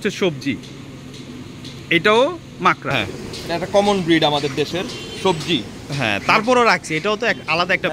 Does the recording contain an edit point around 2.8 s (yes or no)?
yes